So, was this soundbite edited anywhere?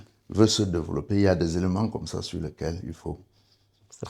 no; 0 cuts

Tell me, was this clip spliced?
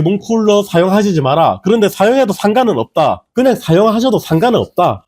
yes; 1 cut; at 3.3 s

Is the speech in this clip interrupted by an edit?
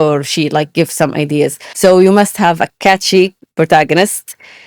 yes; 1 cut; at 1.6 s

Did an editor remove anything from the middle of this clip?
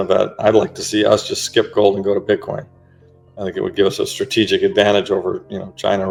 no; 0 cuts

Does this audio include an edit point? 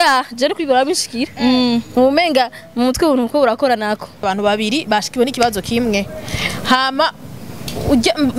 yes; 1 cut; at 4.3 s

